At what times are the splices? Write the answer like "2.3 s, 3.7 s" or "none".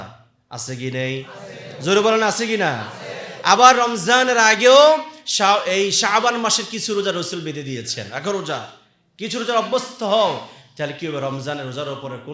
none